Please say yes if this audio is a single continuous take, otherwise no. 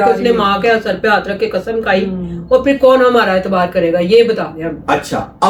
yes